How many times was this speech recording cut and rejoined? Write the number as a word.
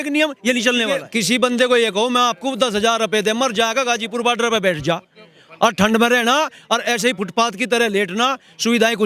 one